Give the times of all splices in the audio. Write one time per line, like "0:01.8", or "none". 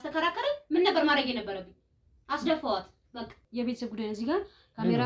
0:03.4